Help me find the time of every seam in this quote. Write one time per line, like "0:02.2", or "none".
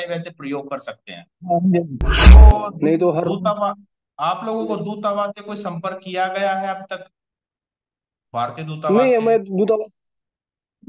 0:02.2